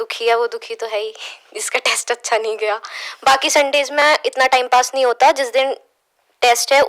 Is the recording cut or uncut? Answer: uncut